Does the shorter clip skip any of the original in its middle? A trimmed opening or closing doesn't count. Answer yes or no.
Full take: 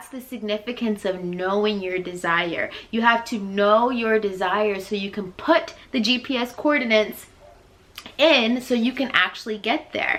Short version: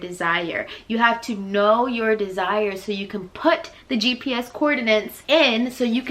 yes